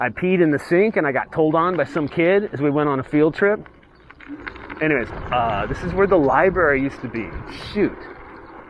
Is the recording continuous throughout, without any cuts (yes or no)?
no